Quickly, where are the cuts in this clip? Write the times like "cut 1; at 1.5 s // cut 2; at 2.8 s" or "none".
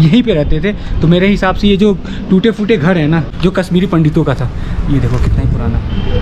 none